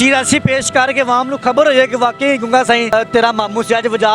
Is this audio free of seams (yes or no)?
no